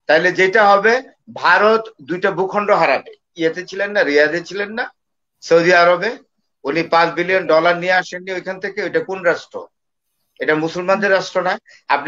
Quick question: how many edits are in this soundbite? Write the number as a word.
one